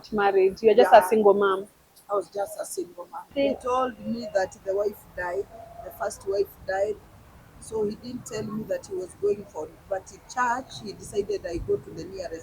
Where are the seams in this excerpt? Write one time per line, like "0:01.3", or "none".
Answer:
0:03.3